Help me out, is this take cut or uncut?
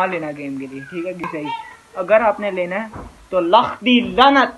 uncut